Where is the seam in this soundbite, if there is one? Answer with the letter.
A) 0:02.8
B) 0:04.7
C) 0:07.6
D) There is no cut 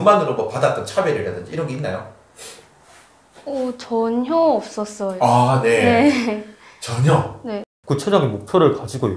C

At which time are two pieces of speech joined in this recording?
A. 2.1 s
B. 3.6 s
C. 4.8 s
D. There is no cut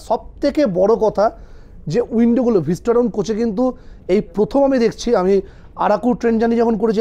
D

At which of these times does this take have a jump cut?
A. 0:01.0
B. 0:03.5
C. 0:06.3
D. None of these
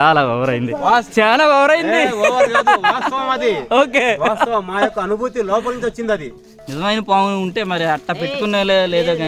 C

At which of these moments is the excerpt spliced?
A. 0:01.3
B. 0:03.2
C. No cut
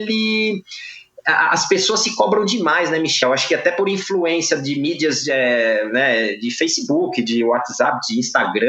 B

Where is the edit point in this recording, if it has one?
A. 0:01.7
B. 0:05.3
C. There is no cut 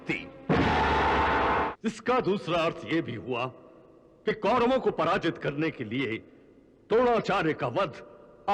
A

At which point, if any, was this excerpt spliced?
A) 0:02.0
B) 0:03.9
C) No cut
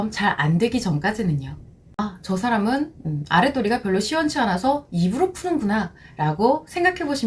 A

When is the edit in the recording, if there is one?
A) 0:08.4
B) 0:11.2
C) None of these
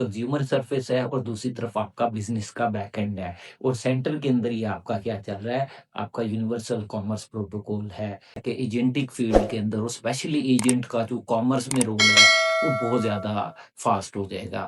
A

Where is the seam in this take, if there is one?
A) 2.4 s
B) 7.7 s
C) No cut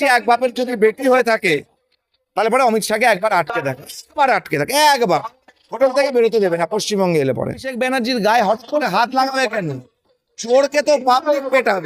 B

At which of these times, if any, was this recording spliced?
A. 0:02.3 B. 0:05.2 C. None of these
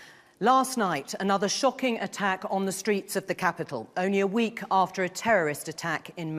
A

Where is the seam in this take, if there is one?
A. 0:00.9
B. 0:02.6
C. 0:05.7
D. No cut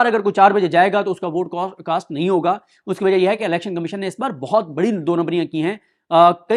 D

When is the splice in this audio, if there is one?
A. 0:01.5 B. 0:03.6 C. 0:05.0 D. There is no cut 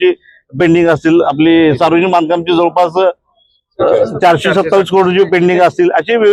D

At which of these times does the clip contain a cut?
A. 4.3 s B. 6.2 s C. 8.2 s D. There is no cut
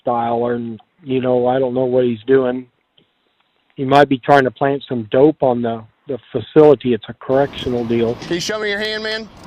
C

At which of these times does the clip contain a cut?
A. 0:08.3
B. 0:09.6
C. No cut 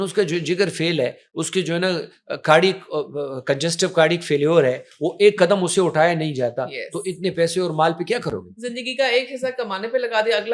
C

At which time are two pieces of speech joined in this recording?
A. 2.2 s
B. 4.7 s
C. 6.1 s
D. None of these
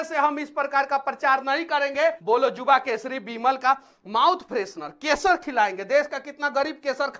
A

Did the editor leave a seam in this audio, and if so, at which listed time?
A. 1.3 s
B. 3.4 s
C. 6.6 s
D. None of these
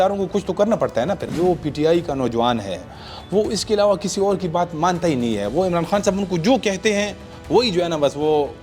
A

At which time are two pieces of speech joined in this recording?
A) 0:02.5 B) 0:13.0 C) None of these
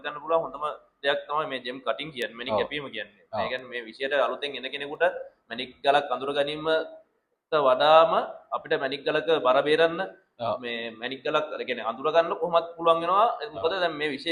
C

